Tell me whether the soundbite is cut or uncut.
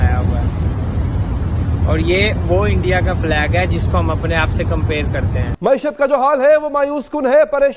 cut